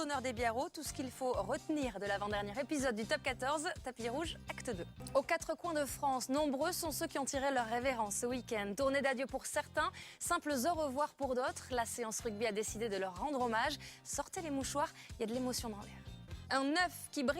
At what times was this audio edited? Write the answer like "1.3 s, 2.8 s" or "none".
1.4 s